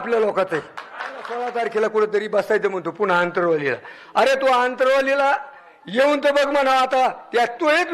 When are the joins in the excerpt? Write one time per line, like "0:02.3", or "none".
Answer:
0:01.4